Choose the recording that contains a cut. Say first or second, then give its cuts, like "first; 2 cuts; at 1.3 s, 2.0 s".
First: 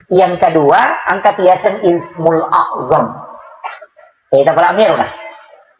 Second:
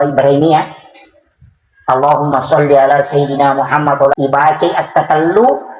second; 1 cut; at 4.1 s